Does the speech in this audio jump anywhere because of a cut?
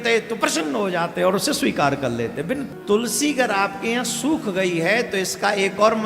yes; 1 cut; at 2.6 s

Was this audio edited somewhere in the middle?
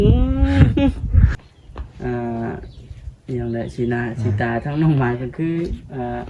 yes; 1 cut; at 1.3 s

